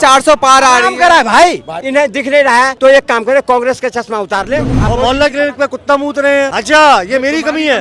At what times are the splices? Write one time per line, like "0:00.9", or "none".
0:01.8
0:02.7
0:04.8
0:06.6